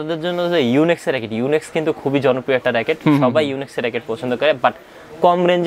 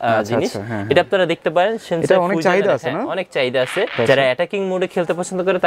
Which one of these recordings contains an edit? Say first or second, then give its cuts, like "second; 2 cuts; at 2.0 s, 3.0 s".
second; 1 cut; at 3.9 s